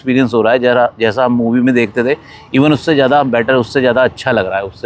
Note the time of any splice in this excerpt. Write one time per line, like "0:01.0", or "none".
none